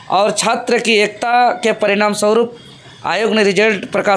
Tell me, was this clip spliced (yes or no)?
no